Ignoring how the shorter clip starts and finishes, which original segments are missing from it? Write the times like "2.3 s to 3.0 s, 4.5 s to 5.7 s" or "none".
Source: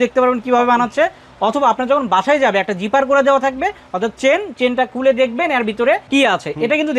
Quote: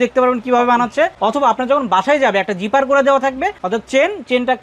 1.1 s to 1.3 s, 3.8 s to 3.9 s